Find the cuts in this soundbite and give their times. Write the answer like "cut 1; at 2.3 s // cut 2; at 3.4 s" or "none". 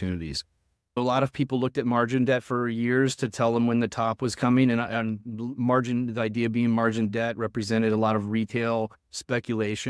cut 1; at 1.0 s

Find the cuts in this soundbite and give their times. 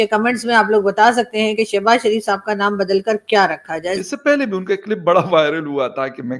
cut 1; at 4.0 s

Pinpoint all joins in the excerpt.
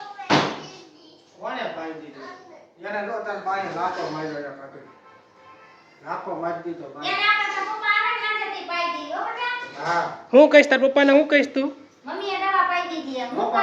none

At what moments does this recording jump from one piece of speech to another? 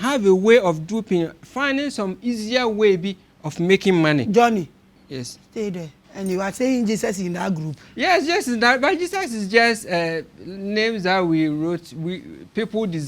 cut 1; at 6.0 s

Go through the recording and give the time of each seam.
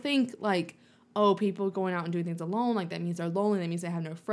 none

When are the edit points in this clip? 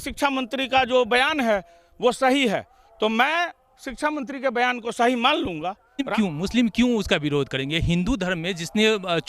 cut 1; at 6.1 s

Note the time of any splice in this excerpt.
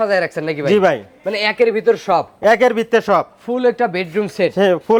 none

